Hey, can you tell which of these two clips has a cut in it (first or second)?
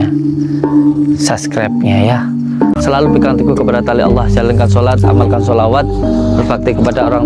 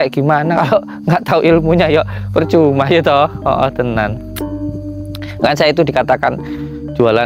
second